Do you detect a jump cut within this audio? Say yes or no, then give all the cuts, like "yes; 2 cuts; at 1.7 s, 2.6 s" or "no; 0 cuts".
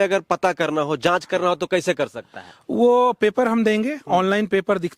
no; 0 cuts